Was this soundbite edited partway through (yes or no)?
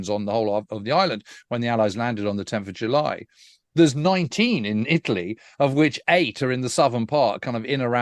no